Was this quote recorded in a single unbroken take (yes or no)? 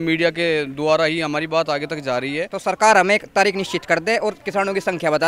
no